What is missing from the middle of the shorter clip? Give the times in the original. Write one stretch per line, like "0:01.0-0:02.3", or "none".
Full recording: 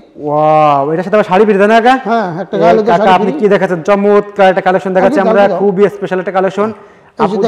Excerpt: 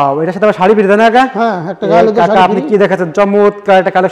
none